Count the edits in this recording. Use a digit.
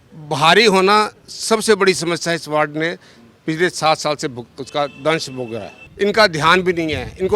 1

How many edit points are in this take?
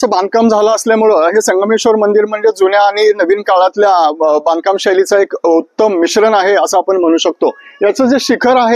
0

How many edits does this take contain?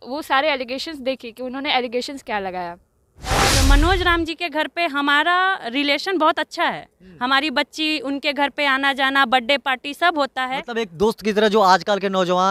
1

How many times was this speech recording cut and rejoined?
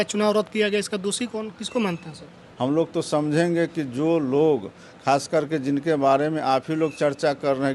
1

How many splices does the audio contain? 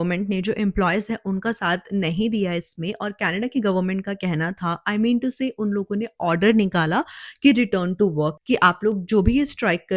0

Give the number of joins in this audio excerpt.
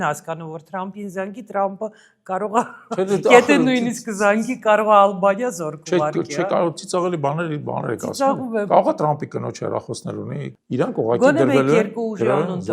1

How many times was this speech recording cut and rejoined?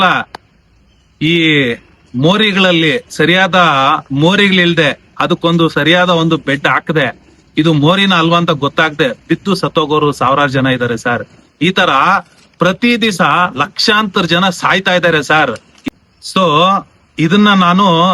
1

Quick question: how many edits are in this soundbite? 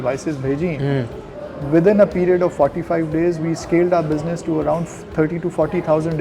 0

